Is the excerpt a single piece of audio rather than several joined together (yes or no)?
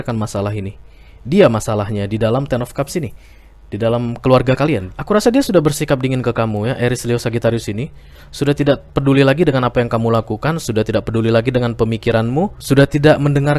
no